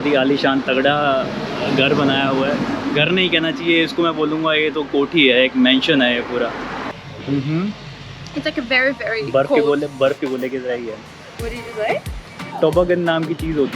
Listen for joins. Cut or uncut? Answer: cut